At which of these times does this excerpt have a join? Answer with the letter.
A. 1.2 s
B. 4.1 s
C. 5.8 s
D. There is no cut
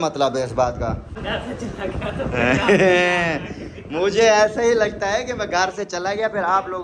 A